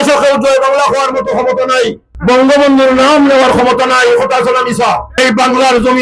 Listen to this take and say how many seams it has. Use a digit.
2